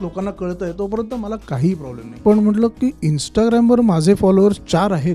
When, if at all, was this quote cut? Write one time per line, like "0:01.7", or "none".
0:02.2